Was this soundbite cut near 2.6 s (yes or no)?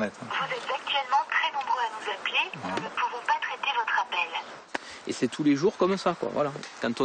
no